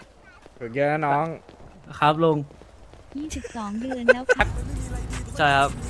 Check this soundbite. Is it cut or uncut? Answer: cut